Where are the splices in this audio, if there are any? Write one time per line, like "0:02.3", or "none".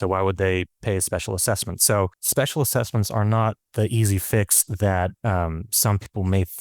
0:02.1